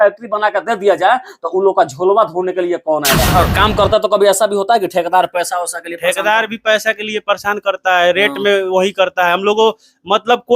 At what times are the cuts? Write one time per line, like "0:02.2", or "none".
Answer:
0:03.3